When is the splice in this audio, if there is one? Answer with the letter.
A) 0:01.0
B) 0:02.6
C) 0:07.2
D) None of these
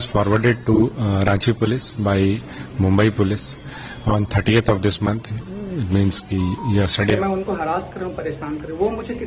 C